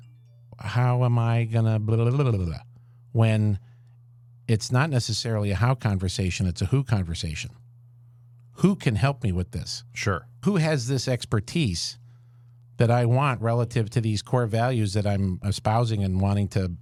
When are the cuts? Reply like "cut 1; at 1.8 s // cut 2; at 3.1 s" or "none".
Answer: none

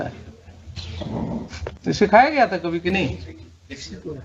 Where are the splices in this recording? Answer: cut 1; at 1.8 s

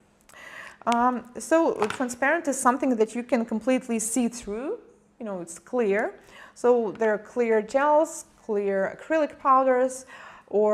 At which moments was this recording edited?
cut 1; at 9.0 s

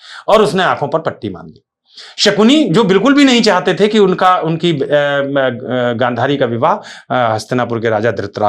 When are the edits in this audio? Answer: none

